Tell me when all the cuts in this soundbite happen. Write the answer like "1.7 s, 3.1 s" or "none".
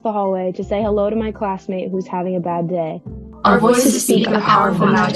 3.1 s